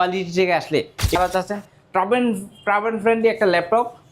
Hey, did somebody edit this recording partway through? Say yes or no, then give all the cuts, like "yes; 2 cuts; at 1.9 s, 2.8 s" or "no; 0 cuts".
yes; 1 cut; at 1.2 s